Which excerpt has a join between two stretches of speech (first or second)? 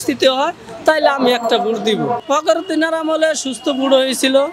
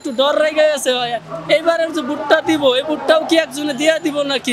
first